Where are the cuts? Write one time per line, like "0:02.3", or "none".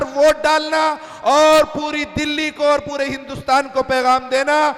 none